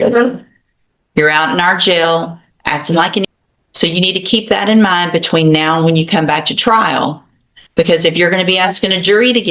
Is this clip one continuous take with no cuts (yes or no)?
no